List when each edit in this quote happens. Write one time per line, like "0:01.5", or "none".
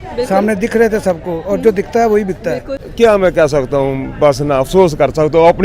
0:02.8